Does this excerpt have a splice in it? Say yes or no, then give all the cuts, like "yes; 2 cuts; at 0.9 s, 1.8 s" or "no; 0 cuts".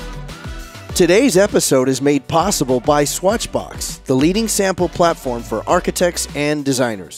yes; 1 cut; at 1.0 s